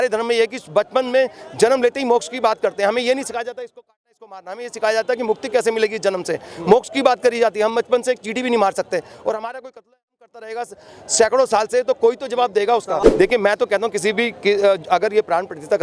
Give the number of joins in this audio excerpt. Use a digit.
1